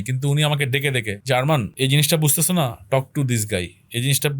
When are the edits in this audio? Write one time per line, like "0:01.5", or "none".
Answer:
0:01.1
0:01.7